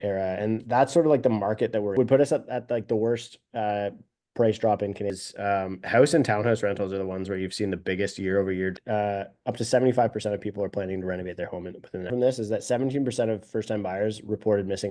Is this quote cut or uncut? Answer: cut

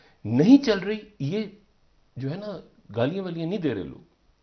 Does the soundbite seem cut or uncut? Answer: uncut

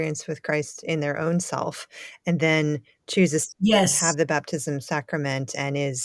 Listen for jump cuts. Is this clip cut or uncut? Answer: uncut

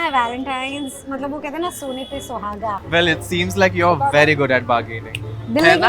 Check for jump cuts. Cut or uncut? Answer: cut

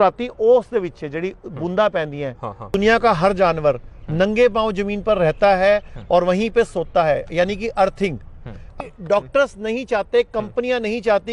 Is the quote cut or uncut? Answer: cut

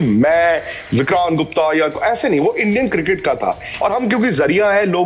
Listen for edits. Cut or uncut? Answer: uncut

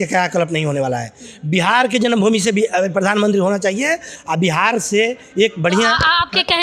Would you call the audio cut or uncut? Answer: uncut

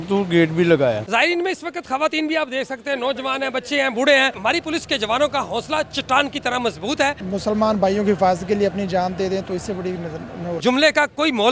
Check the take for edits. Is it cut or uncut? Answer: cut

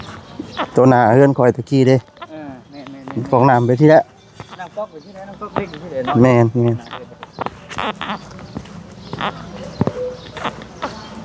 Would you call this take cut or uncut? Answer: uncut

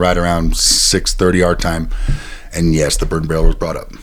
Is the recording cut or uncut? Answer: uncut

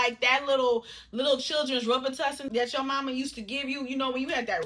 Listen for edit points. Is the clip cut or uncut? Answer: uncut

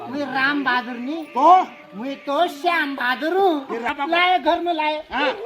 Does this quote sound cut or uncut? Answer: cut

